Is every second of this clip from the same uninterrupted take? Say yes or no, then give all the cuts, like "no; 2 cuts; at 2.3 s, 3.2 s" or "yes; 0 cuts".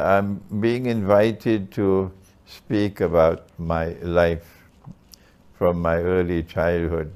yes; 0 cuts